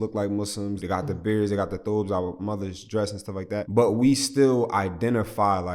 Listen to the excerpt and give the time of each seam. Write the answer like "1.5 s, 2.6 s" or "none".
0.8 s, 3.7 s